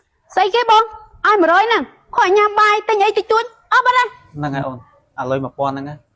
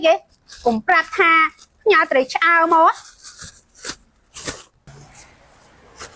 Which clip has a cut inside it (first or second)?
first